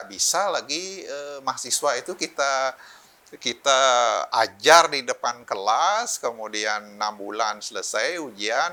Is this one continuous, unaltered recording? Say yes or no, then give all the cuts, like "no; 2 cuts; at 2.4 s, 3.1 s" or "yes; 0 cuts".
yes; 0 cuts